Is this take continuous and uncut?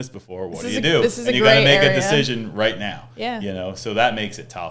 yes; 0 cuts

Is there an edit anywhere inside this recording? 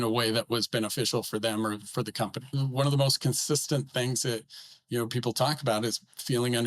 yes; 1 cut; at 2.5 s

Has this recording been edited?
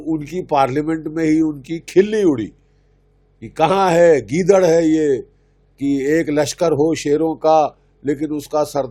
no; 0 cuts

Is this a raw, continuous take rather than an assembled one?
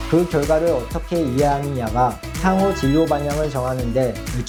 yes; 0 cuts

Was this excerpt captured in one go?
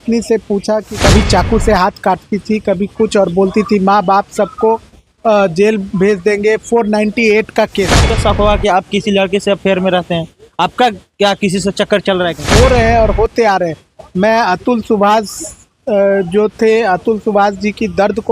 no; 3 cuts; at 0.9 s, 8.0 s, 12.4 s

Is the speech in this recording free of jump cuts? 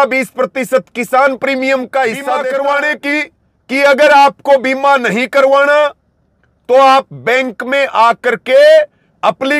no; 1 cut; at 2.3 s

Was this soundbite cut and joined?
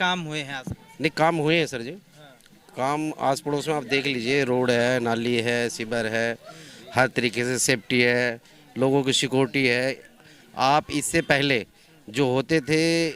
no; 0 cuts

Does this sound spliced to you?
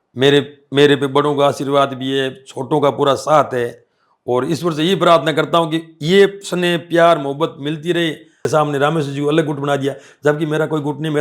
yes; 1 cut; at 8.5 s

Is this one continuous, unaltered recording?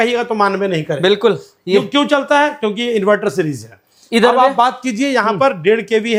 yes; 0 cuts

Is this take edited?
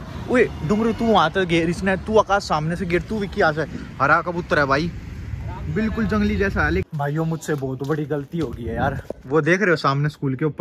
yes; 1 cut; at 6.8 s

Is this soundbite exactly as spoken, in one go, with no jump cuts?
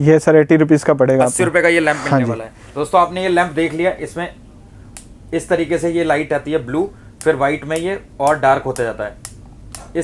yes; 0 cuts

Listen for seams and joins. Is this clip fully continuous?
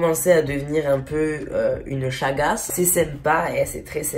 yes; 0 cuts

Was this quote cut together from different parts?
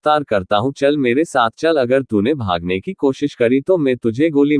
no; 0 cuts

